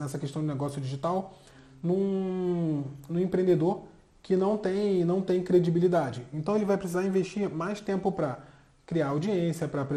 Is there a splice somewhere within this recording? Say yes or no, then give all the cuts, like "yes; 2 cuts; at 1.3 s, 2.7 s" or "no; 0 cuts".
no; 0 cuts